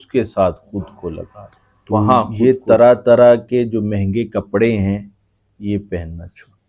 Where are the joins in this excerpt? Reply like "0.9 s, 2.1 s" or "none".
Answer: 2.3 s